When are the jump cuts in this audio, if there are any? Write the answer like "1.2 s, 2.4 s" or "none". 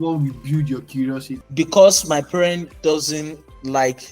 1.4 s